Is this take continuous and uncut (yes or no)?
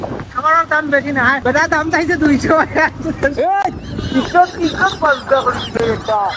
no